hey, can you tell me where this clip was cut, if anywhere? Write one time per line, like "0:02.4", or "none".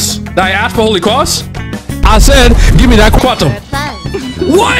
0:03.2

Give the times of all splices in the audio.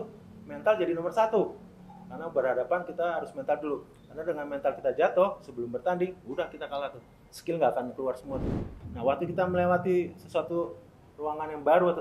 0:08.8

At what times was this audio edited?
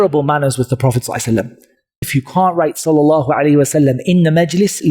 0:02.1

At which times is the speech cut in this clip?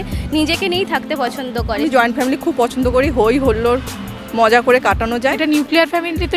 0:01.8
0:05.4

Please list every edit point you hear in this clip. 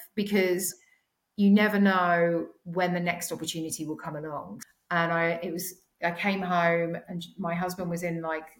0:04.6

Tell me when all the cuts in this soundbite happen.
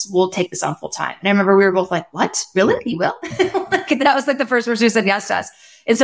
none

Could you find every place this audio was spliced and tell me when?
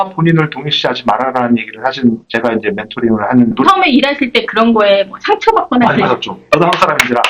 0:03.6
0:06.4

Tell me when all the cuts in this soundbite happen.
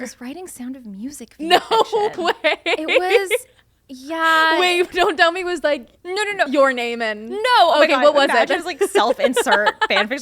0:06.0

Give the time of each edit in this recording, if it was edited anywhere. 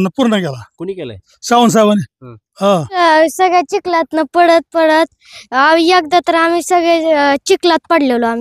0:03.0

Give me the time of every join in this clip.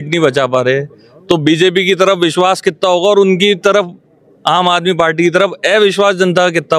none

